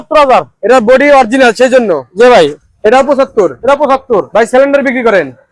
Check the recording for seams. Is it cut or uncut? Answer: cut